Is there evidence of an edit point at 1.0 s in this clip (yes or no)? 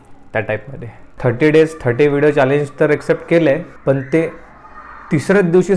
yes